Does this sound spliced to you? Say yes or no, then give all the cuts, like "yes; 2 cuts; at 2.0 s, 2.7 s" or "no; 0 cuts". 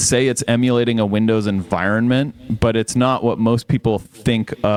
no; 0 cuts